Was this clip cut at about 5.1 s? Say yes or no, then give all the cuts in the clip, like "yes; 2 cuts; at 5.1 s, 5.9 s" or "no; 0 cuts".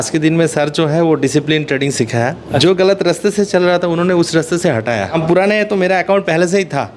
yes; 2 cuts; at 2.6 s, 5.1 s